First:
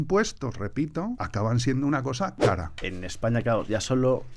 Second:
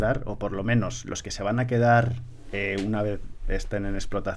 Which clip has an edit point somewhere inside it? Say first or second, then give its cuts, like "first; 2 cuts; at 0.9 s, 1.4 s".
first; 2 cuts; at 1.2 s, 2.8 s